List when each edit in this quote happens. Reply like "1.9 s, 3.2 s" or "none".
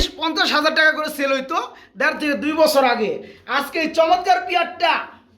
none